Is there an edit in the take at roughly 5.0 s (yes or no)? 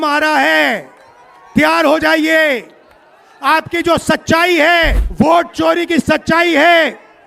yes